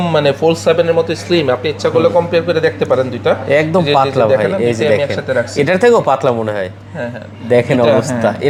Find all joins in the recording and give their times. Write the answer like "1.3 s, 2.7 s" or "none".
none